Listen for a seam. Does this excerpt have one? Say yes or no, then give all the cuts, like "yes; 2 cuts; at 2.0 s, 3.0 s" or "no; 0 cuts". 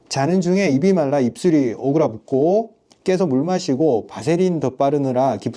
no; 0 cuts